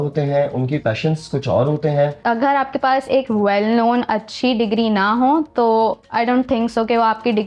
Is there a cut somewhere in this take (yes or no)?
yes